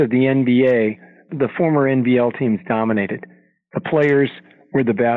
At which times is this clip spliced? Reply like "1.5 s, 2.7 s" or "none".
1.3 s